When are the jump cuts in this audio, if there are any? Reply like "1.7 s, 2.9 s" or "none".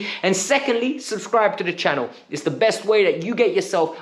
none